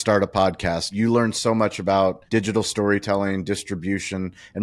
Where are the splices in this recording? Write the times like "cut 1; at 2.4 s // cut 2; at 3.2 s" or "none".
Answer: cut 1; at 0.9 s // cut 2; at 2.2 s